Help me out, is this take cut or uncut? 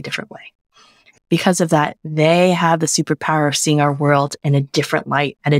cut